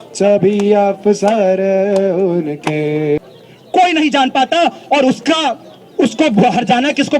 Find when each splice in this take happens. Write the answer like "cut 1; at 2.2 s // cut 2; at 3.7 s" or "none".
cut 1; at 3.2 s